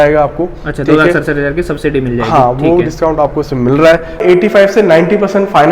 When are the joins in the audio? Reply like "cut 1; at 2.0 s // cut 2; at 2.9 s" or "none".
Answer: cut 1; at 4.2 s